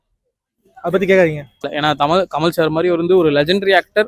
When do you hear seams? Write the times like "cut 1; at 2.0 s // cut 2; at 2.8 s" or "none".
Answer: cut 1; at 1.6 s

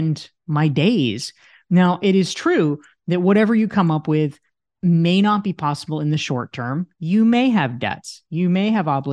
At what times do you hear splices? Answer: none

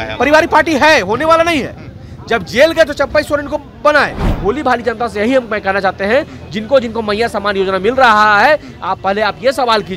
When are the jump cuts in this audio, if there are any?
cut 1; at 4.2 s

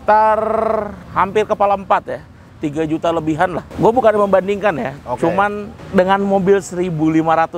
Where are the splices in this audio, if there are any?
cut 1; at 1.0 s // cut 2; at 3.7 s // cut 3; at 5.7 s

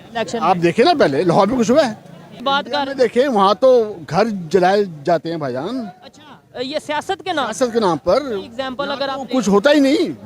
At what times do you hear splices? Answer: cut 1; at 2.3 s

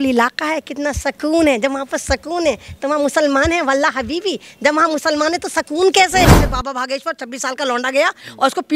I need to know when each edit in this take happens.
cut 1; at 6.3 s

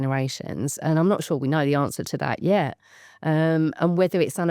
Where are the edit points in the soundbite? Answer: none

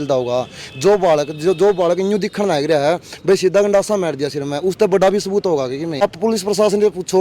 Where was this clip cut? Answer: cut 1; at 6.0 s

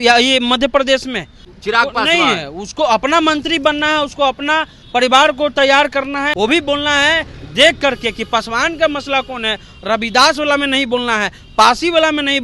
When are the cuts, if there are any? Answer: cut 1; at 1.4 s // cut 2; at 6.3 s

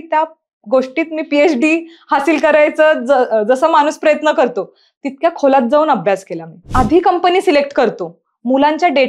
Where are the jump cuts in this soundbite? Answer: cut 1; at 6.6 s

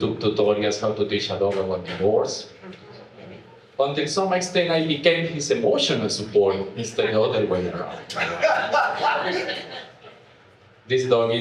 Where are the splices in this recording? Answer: none

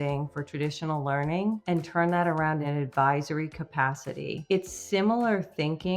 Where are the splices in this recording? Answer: cut 1; at 2.7 s // cut 2; at 4.4 s

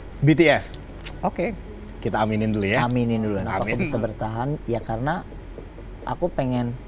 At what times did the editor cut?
cut 1; at 3.6 s

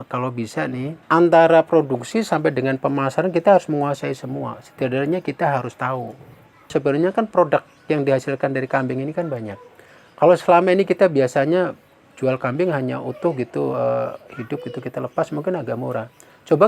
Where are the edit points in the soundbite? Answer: cut 1; at 1.0 s // cut 2; at 6.7 s

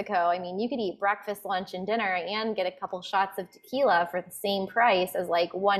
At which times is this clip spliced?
none

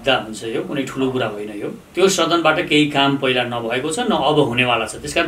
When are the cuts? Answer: cut 1; at 1.8 s

